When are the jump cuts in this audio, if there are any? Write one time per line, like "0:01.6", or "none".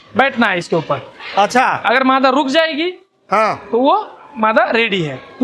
none